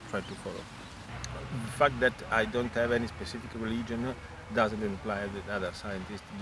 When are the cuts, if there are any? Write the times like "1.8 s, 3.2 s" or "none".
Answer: 1.1 s